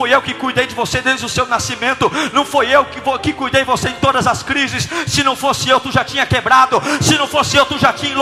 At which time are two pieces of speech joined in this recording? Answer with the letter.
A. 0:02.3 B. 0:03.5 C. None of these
C